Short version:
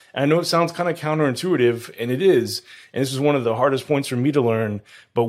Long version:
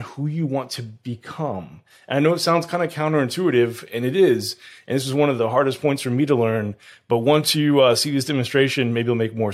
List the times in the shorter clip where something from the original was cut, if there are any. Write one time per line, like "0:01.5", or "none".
none